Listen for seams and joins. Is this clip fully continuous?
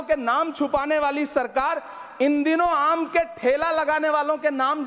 yes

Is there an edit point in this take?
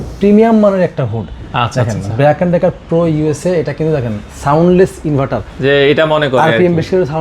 no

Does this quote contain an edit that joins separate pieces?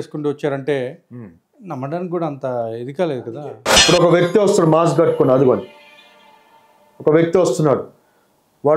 yes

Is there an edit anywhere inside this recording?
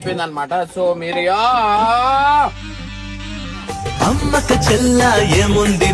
no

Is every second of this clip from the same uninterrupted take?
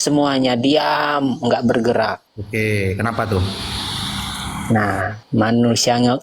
no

